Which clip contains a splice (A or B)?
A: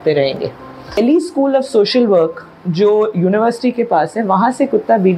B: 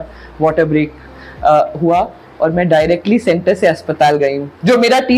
A